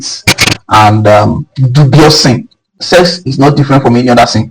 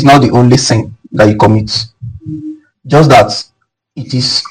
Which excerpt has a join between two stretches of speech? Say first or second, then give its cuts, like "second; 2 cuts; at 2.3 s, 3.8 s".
first; 1 cut; at 2.7 s